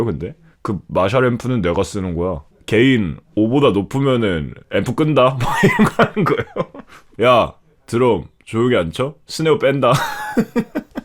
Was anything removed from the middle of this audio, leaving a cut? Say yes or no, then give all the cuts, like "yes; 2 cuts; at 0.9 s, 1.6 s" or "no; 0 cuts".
yes; 2 cuts; at 2.5 s, 4.5 s